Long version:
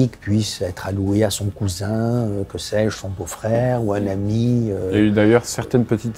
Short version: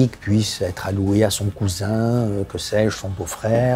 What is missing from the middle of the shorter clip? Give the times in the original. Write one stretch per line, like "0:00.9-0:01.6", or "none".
none